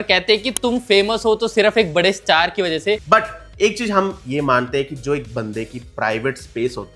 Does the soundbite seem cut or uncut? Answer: cut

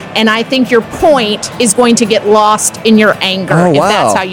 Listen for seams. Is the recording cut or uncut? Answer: uncut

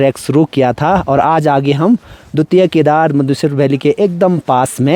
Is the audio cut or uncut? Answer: uncut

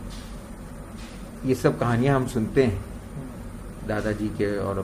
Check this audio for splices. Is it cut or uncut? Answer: uncut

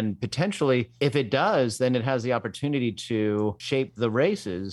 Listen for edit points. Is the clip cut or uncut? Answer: cut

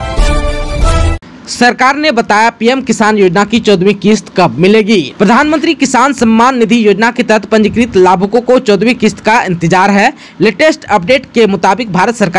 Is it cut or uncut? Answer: cut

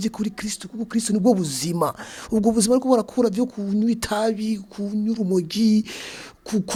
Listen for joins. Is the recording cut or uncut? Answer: uncut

